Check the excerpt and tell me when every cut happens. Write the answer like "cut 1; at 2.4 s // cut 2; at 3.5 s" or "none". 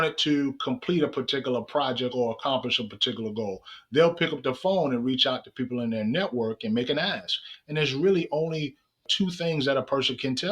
cut 1; at 9.0 s